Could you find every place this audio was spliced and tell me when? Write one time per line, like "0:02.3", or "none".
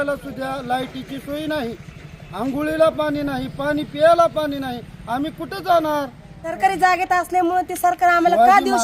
0:06.6